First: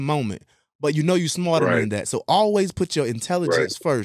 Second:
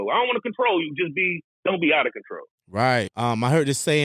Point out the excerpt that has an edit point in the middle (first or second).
second